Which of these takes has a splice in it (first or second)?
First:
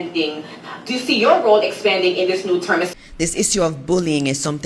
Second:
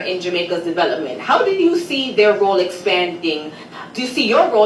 first